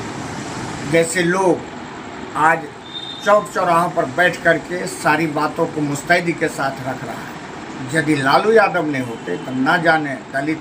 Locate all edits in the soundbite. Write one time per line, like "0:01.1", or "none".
none